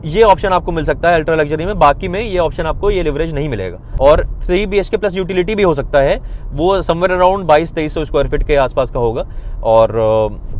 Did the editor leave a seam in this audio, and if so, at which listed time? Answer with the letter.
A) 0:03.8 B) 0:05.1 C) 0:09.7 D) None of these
A